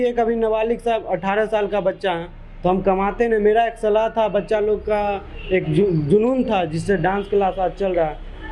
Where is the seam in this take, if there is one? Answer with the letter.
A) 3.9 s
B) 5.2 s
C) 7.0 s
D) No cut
D